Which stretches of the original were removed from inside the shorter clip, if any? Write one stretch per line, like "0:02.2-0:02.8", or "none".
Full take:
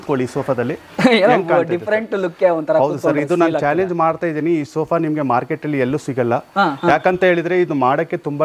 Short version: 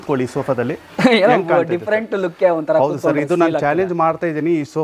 none